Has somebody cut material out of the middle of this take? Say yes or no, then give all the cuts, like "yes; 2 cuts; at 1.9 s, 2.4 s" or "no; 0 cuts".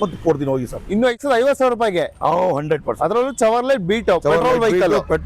yes; 1 cut; at 1.2 s